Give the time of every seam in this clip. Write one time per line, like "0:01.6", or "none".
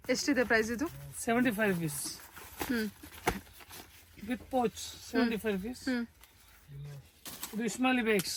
none